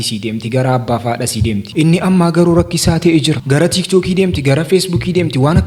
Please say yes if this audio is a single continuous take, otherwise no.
yes